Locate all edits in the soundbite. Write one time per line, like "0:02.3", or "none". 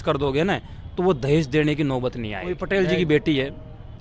0:02.6

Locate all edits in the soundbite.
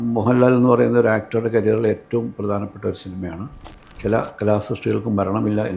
0:03.8

